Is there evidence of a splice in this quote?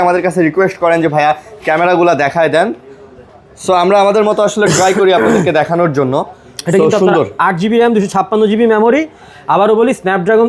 no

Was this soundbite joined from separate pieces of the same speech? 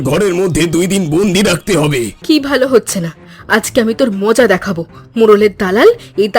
yes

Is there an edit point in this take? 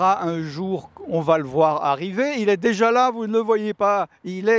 no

